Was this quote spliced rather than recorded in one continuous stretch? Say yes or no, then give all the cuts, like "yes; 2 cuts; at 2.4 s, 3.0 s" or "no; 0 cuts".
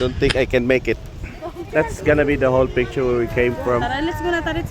yes; 1 cut; at 1.5 s